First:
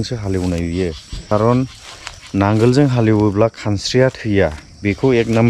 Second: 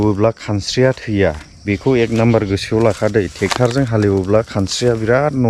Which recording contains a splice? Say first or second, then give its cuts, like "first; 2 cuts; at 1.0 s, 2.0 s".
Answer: first; 1 cut; at 1.2 s